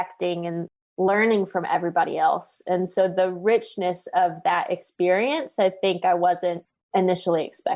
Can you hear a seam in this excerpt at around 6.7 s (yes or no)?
yes